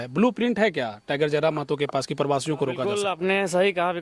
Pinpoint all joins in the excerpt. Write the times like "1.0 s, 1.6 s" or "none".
3.0 s